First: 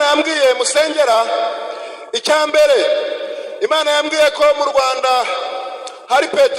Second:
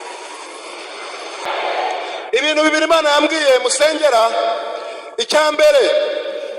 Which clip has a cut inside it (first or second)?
second